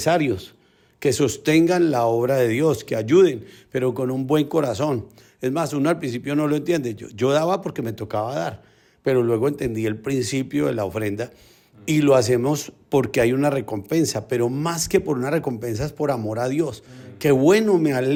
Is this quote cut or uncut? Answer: uncut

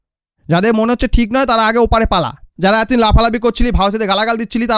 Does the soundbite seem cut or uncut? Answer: cut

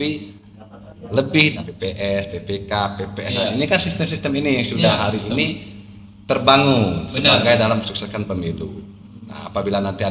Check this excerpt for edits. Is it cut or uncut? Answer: cut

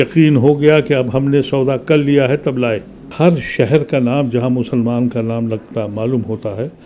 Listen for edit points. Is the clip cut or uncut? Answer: cut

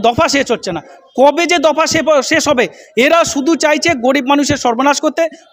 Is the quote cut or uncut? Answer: uncut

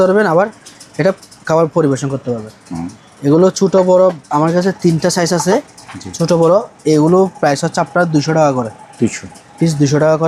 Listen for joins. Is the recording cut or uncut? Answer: uncut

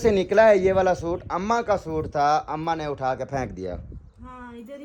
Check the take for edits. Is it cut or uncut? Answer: uncut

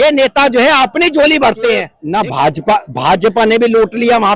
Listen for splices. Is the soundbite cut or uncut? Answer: cut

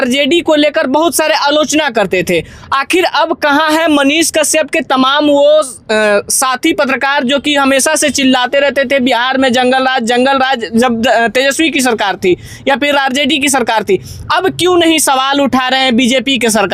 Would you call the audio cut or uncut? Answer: uncut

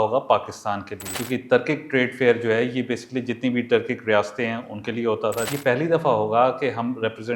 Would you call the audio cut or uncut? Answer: cut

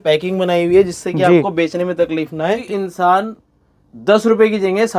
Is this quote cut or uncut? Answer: cut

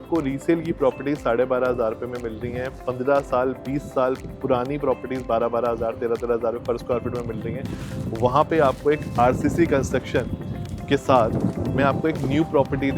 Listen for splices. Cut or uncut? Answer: uncut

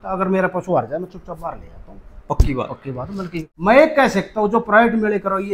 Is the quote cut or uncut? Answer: cut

